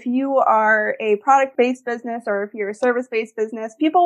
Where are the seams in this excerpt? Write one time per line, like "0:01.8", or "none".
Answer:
0:01.5